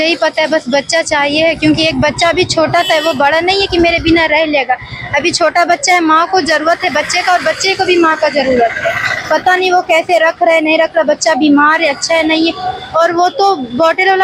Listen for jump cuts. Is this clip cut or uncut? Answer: uncut